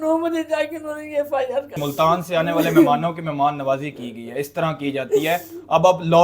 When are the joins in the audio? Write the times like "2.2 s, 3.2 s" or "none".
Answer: 1.8 s